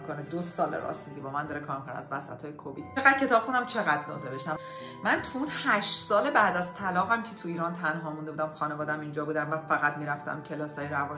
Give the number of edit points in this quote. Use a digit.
2